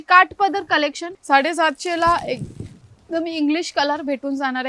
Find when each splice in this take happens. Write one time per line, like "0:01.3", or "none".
0:01.1